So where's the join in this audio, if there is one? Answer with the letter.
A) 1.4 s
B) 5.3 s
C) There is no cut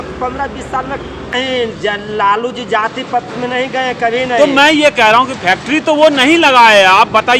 A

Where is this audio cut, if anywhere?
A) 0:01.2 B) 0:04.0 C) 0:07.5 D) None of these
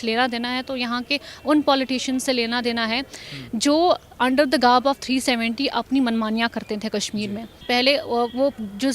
C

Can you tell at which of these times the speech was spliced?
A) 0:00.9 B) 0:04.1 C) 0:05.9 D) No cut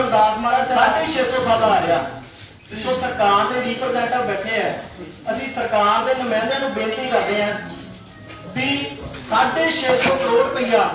A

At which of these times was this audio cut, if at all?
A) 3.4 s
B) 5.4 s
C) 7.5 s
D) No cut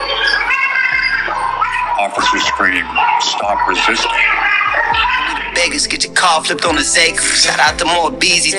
B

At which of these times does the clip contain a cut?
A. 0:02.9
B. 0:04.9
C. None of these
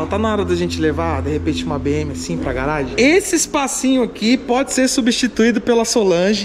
A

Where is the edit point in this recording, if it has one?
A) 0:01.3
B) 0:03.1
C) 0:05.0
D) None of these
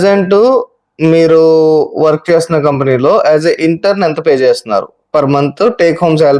D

